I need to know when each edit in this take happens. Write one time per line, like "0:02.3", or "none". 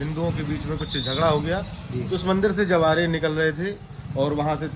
none